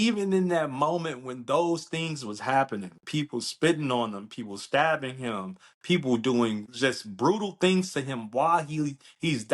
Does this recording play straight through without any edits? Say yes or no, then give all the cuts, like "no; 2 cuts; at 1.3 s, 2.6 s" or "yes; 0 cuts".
no; 1 cut; at 6.7 s